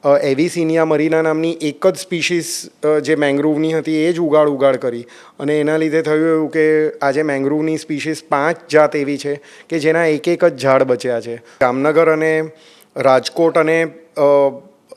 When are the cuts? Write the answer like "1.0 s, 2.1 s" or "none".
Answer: 11.6 s

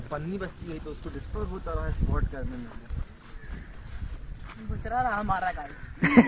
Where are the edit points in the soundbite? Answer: none

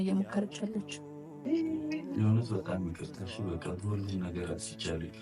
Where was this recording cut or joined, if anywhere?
1.4 s

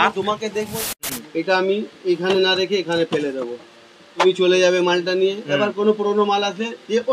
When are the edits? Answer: 0.9 s, 4.2 s

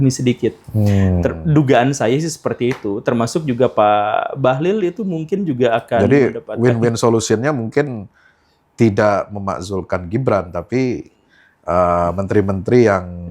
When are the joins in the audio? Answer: none

